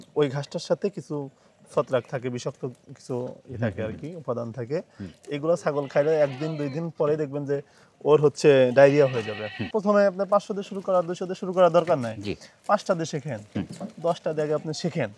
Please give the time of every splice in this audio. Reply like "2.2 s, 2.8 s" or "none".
9.5 s